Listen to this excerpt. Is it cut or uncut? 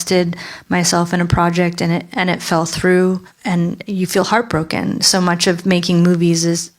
cut